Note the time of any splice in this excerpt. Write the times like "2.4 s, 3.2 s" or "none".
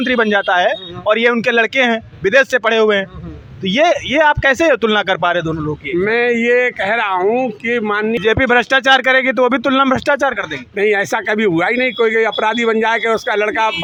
none